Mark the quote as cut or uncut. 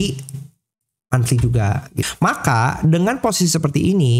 cut